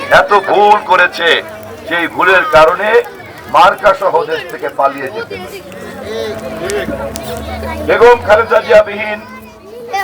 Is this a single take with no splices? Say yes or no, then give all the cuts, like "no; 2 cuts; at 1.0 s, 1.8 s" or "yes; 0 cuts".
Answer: yes; 0 cuts